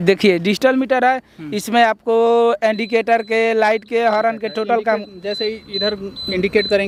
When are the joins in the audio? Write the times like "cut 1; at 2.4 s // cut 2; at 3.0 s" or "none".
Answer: none

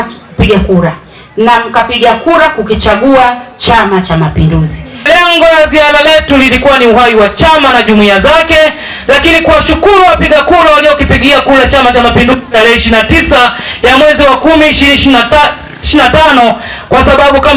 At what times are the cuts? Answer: cut 1; at 5.0 s

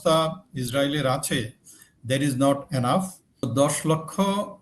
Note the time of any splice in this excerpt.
cut 1; at 3.5 s

